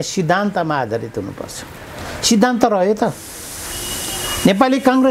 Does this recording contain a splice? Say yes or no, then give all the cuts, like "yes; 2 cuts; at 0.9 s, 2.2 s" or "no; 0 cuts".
no; 0 cuts